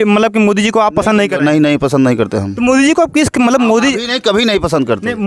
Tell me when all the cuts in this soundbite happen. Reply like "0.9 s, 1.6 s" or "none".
none